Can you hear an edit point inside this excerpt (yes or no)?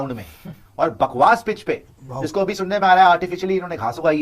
no